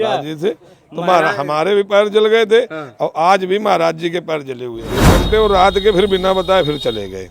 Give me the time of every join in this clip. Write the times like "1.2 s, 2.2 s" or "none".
5.0 s